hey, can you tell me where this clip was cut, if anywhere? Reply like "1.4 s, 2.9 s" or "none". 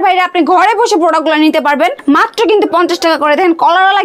2.0 s